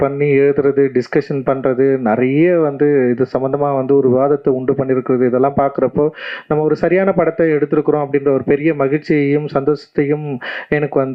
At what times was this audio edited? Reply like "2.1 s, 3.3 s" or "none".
none